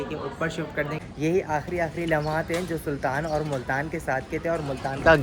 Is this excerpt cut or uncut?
cut